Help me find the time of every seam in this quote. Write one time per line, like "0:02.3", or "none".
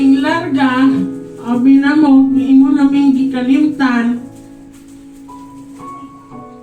none

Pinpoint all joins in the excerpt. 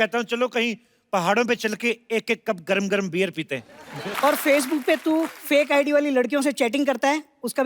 0:04.1

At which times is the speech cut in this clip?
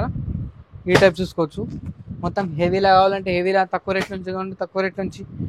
none

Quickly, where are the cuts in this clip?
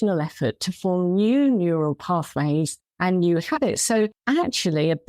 0:02.8
0:04.2

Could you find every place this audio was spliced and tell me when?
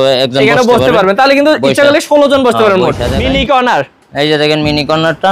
0:03.1

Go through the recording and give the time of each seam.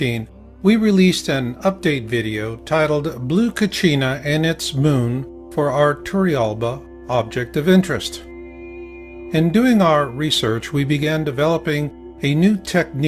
none

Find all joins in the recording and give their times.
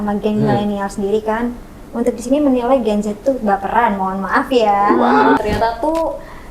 0:05.4

